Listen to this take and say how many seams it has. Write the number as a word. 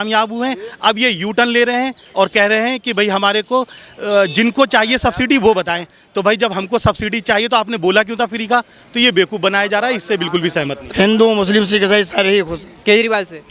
one